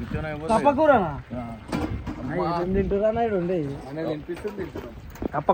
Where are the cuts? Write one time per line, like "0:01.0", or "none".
none